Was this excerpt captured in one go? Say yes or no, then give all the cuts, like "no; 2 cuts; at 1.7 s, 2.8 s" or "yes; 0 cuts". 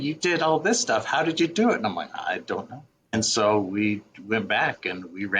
no; 1 cut; at 3.1 s